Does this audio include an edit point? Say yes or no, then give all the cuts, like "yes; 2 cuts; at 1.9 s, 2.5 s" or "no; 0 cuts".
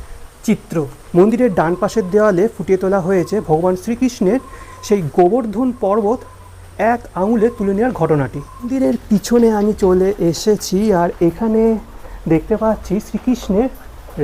yes; 2 cuts; at 1.0 s, 8.7 s